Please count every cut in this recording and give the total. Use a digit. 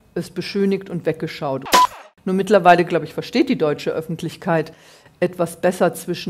1